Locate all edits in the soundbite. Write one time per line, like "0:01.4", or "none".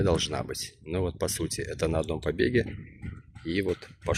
none